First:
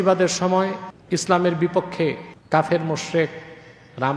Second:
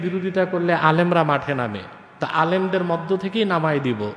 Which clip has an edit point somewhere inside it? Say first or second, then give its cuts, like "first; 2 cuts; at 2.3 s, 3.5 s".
first; 2 cuts; at 0.9 s, 2.3 s